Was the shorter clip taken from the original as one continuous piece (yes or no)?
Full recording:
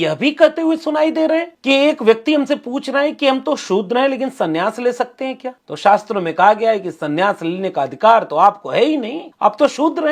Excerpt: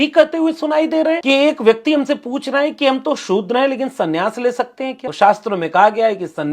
no